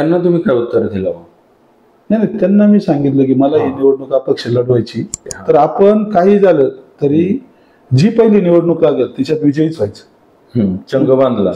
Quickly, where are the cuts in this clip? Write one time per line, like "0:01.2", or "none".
0:05.1